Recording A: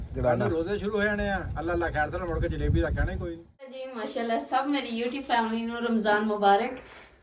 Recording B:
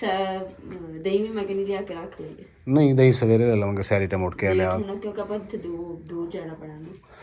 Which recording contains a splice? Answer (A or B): A